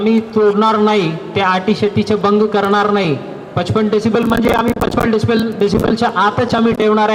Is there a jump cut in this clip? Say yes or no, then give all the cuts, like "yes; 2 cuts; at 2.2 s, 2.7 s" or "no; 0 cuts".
no; 0 cuts